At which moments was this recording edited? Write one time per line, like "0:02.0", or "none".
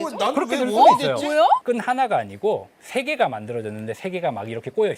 0:01.6